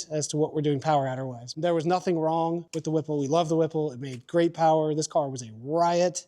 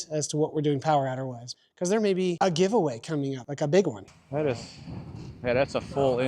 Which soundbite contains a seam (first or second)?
second